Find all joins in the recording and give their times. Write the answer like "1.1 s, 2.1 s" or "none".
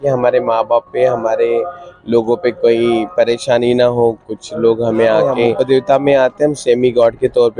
5.5 s